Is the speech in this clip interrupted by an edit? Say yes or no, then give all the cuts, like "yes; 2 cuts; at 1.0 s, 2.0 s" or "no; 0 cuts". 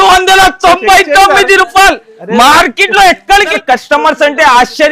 yes; 1 cut; at 3.5 s